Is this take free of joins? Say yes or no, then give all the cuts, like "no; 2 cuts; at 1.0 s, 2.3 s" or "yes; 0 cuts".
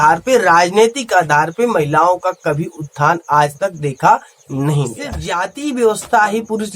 no; 1 cut; at 5.6 s